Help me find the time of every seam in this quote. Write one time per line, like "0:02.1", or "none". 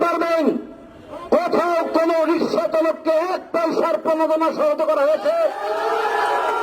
none